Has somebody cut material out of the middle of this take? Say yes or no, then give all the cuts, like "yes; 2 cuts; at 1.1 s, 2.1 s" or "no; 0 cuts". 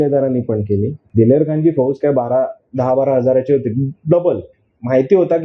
yes; 1 cut; at 1.0 s